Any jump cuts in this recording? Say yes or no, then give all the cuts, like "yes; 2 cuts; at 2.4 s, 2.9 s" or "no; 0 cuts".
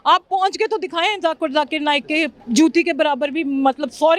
yes; 1 cut; at 2.4 s